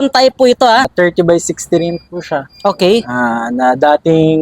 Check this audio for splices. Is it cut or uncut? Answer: cut